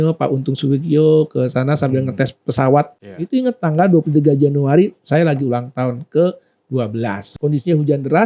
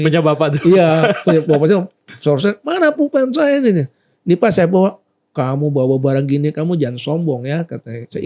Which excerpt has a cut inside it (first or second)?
first